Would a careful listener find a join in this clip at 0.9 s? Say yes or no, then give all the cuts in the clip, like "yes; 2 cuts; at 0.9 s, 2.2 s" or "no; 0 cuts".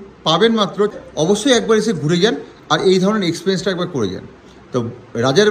yes; 1 cut; at 0.9 s